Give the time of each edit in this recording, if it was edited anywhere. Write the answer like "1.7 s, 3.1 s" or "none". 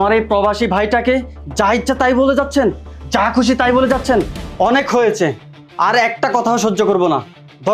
none